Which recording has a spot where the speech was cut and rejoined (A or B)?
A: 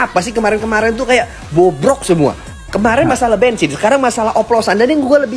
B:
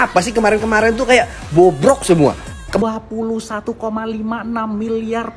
B